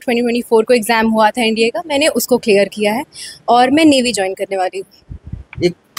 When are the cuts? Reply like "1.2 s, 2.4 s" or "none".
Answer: none